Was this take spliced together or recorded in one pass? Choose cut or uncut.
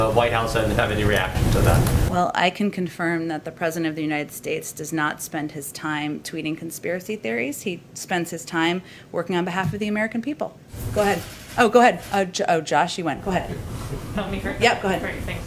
uncut